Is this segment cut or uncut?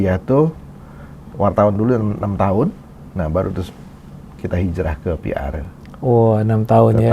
uncut